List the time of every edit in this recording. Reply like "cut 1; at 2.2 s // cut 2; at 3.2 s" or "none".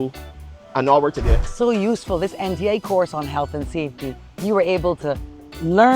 cut 1; at 1.4 s